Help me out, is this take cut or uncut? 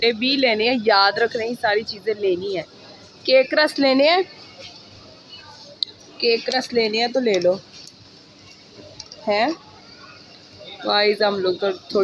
uncut